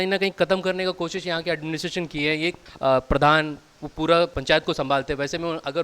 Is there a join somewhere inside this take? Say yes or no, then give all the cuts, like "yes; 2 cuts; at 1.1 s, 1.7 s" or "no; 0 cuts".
yes; 2 cuts; at 2.7 s, 4.4 s